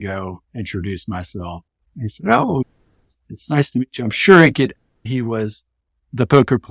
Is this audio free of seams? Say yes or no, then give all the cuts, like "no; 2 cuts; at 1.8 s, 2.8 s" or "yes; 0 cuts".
yes; 0 cuts